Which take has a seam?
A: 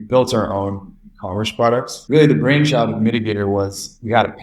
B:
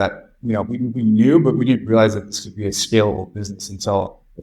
A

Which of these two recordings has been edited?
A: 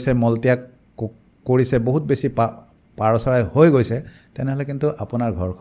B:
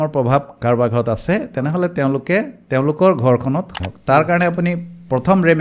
B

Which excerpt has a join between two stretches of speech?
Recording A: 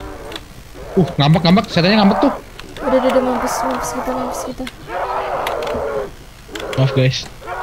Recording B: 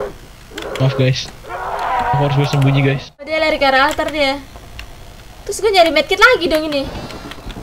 B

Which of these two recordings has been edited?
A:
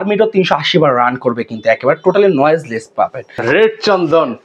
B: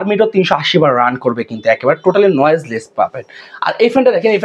A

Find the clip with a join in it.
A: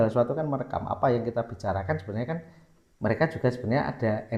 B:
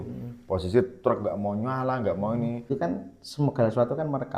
B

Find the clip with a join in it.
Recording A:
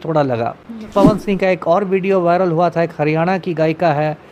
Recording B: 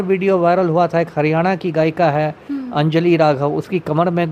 A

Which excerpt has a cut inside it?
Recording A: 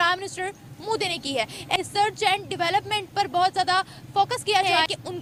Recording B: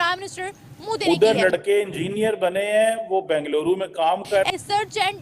B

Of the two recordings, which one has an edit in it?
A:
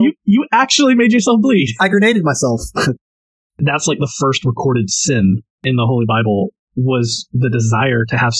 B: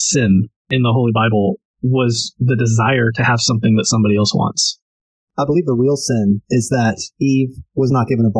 A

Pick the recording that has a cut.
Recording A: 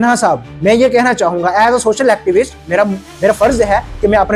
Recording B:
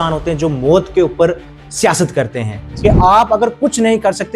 B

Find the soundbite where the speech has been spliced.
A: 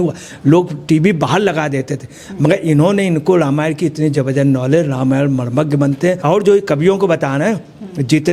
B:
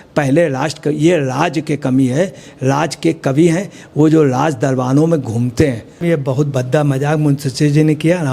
B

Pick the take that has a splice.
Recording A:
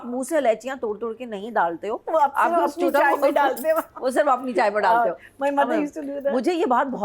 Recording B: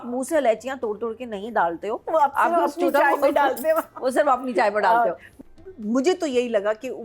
B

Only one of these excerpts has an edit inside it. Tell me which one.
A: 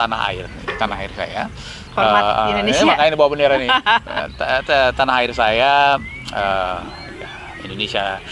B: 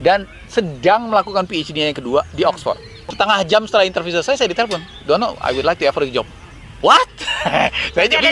B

